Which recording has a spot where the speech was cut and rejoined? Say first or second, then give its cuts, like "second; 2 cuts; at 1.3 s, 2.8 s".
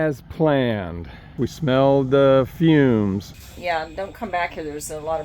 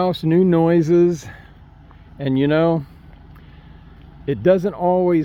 first; 2 cuts; at 1.4 s, 3.3 s